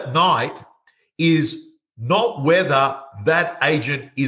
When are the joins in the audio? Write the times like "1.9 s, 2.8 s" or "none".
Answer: none